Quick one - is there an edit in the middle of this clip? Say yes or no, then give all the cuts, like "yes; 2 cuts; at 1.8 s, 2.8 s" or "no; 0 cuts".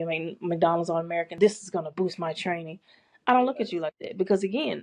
yes; 1 cut; at 1.4 s